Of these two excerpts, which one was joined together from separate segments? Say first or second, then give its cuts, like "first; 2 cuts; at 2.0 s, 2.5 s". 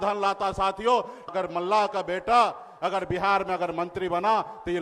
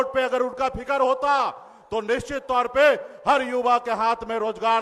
first; 1 cut; at 1.3 s